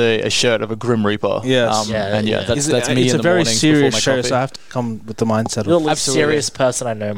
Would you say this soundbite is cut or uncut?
cut